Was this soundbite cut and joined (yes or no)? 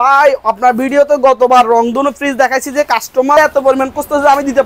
yes